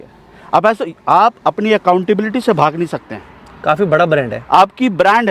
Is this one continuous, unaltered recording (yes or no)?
yes